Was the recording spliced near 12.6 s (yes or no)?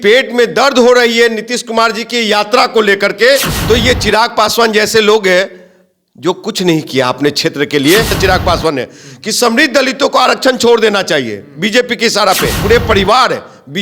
yes